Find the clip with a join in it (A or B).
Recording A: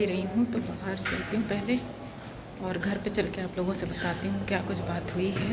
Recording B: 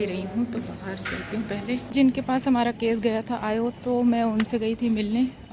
B